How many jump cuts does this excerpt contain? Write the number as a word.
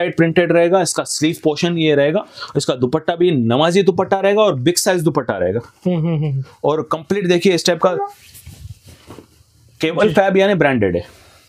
zero